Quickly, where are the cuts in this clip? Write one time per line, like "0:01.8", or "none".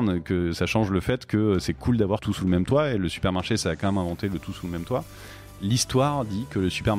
0:02.3
0:05.6

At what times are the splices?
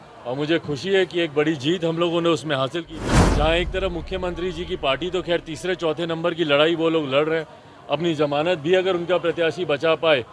0:02.9

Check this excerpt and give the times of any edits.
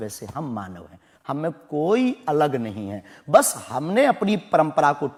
none

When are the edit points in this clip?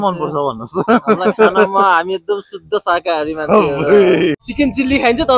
0:04.3

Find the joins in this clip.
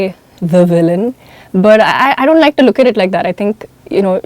none

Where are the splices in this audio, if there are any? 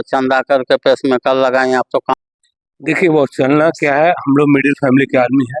0:02.2

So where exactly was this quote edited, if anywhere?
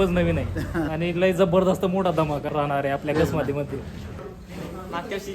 0:00.9
0:02.5
0:04.2

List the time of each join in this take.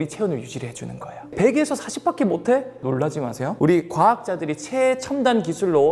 0:01.3
0:02.8

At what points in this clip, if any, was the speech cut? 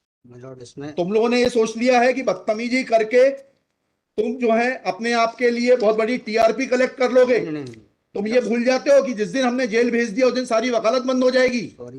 none

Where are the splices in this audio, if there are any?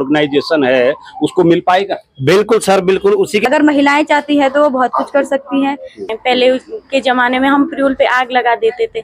0:03.4
0:06.0

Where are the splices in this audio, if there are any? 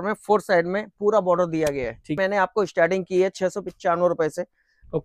0:02.2

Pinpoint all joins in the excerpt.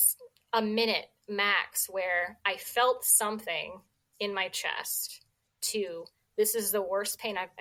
none

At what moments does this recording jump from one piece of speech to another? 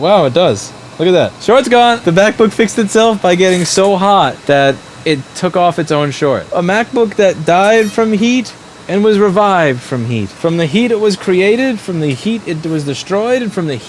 0:01.4
0:02.0
0:04.4
0:06.5
0:10.3

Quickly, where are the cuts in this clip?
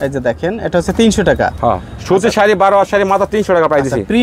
none

